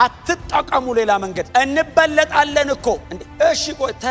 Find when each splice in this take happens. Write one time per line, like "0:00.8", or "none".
0:01.4
0:03.2